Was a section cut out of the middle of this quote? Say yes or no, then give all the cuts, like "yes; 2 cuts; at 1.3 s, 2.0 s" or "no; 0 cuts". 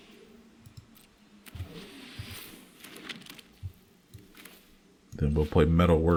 no; 0 cuts